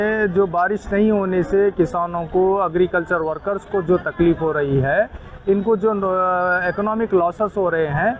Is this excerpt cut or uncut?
uncut